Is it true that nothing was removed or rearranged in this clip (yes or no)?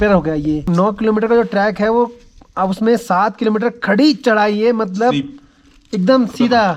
yes